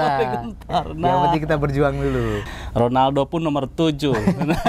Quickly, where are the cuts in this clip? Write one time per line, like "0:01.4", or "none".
0:02.4